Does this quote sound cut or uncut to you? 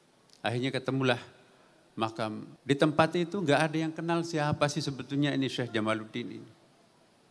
cut